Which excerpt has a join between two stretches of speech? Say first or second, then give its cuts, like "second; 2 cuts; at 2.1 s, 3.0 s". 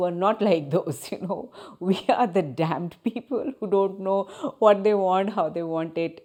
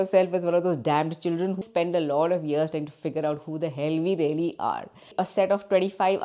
second; 2 cuts; at 1.7 s, 5.2 s